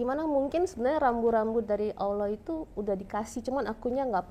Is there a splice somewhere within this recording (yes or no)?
no